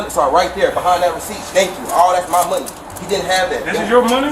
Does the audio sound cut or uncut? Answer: uncut